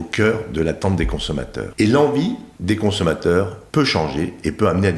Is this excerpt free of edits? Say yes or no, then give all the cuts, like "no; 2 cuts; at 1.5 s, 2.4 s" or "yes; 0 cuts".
no; 3 cuts; at 1.6 s, 2.5 s, 3.6 s